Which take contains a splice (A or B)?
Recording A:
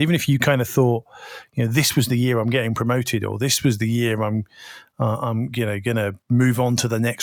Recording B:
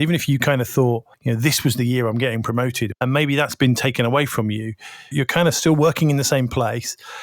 B